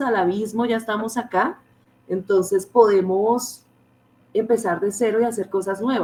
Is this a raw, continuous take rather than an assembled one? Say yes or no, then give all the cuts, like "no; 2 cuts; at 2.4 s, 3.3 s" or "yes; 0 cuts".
yes; 0 cuts